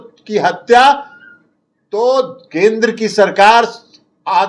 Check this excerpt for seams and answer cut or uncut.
uncut